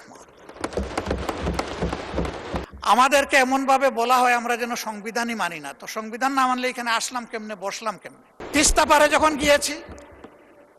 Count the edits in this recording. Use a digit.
2